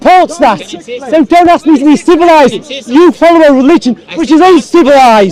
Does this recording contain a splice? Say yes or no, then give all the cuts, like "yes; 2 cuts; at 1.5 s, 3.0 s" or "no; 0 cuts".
no; 0 cuts